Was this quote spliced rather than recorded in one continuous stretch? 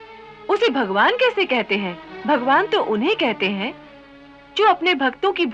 yes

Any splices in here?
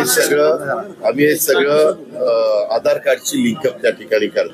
no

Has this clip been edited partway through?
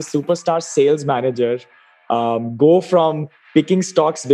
no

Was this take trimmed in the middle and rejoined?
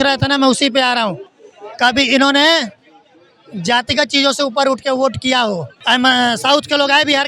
yes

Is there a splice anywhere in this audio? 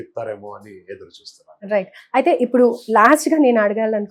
no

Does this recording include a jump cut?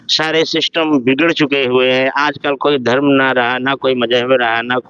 no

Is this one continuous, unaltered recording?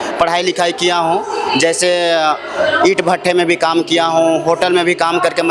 yes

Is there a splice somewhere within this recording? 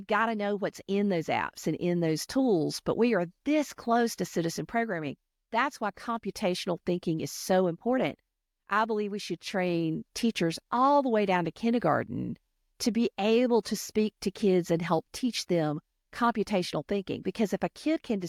no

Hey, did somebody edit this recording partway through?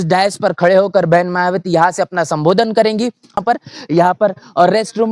yes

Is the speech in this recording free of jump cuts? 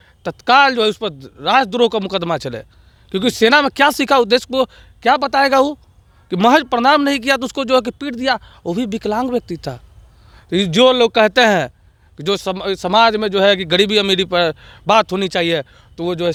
yes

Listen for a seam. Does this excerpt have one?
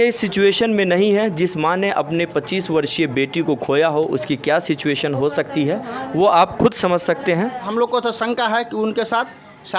yes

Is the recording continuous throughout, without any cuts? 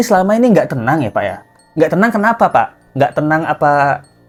yes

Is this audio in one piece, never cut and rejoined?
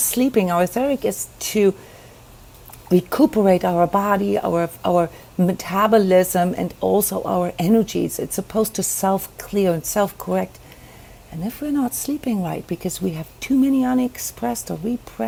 yes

